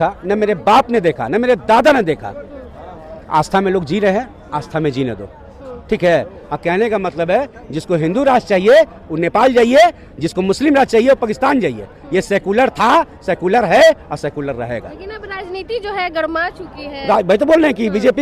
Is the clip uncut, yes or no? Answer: yes